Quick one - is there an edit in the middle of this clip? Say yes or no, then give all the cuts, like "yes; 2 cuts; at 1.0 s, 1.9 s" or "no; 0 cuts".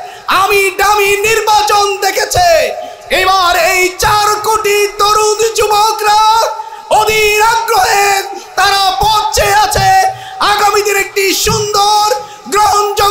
no; 0 cuts